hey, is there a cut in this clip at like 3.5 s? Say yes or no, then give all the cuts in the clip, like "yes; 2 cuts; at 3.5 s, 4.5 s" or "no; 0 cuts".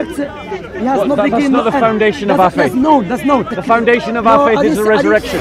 yes; 1 cut; at 3.5 s